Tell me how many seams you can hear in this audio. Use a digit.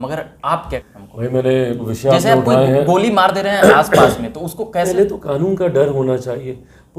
3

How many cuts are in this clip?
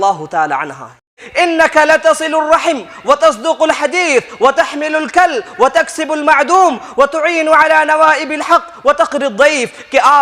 1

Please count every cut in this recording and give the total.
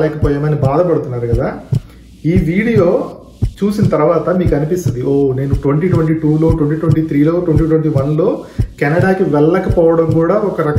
0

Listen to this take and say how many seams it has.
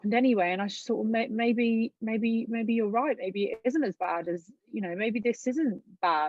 0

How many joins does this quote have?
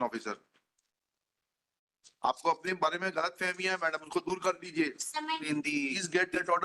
1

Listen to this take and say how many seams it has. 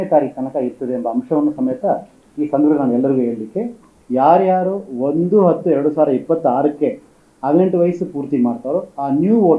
1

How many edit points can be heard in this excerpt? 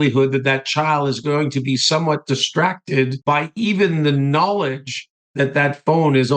1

